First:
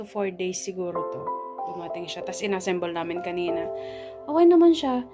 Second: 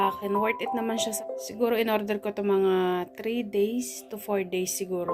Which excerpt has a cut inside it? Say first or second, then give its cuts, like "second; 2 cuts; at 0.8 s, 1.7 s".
second; 1 cut; at 1.1 s